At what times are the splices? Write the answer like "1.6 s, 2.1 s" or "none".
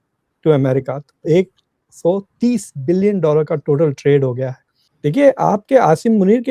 4.9 s